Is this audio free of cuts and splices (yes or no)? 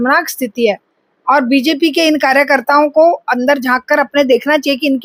yes